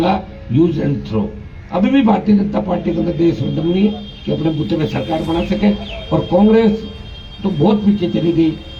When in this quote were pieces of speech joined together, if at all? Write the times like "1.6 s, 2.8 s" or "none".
none